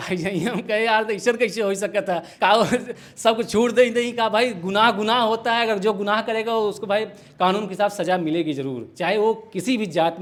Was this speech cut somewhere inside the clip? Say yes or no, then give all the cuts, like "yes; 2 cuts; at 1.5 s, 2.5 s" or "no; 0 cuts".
no; 0 cuts